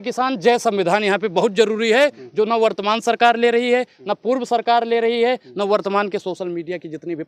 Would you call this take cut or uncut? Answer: uncut